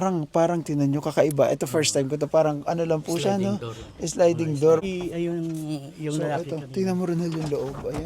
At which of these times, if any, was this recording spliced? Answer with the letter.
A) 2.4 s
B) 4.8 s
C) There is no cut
B